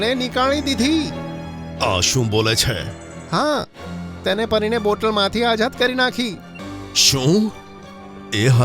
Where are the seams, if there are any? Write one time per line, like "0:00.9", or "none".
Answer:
0:06.6